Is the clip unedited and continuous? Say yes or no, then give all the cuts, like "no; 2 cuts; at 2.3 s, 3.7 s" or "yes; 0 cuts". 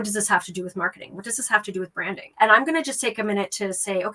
no; 1 cut; at 2.3 s